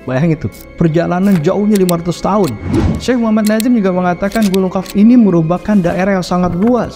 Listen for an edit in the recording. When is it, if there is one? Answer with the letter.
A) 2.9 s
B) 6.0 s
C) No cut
A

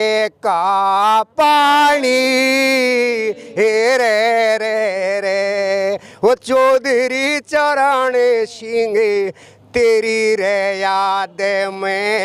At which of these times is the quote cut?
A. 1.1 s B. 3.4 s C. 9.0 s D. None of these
D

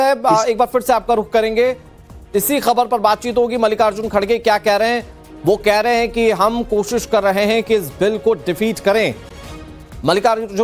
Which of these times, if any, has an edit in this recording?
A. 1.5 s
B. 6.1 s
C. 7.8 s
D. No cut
D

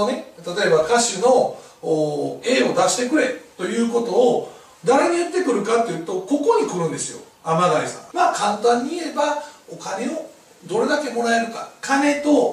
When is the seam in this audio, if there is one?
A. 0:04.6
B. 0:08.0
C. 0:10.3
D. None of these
B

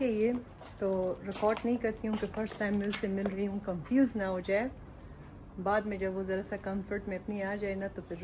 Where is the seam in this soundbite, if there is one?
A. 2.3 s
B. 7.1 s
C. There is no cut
C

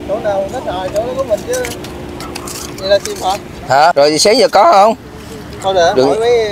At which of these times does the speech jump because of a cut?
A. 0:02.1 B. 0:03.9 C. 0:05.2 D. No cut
B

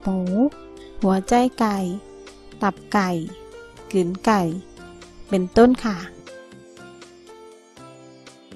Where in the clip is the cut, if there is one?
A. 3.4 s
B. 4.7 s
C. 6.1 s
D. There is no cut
C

